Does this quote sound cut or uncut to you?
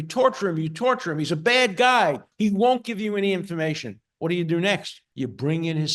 cut